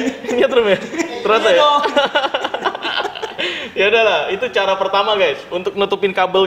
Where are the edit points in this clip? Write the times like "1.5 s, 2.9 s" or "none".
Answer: none